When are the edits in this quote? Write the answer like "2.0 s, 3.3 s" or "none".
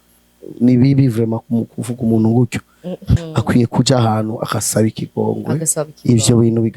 3.1 s